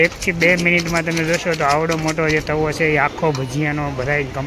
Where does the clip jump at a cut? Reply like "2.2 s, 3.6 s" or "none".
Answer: none